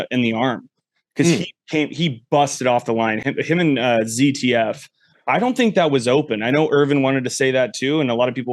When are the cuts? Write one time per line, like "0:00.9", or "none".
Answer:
none